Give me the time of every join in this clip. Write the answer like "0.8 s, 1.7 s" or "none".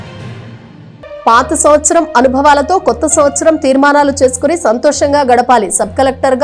0.9 s

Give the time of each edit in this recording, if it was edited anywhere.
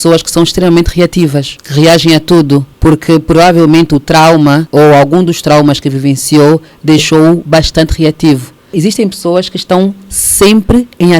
1.6 s, 2.7 s, 4.7 s, 8.7 s

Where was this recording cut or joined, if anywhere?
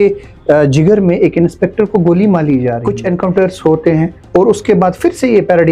2.9 s

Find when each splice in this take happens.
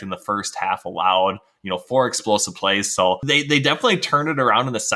3.2 s

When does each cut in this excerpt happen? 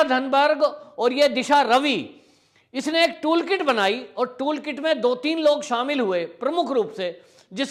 none

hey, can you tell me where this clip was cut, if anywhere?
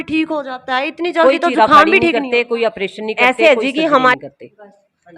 4.2 s

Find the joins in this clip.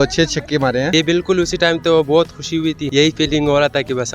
0.9 s

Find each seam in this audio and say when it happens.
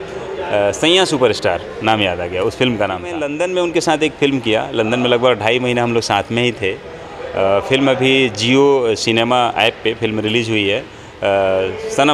3.2 s

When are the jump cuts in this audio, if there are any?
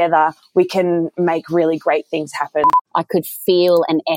2.8 s

